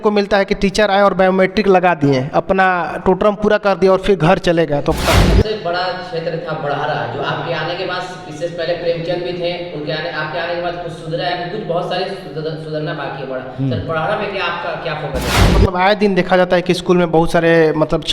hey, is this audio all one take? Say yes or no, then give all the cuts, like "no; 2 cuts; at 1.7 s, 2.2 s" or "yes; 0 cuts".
no; 2 cuts; at 5.2 s, 15.5 s